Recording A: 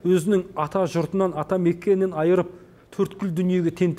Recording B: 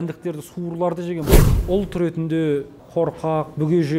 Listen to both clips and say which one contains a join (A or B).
B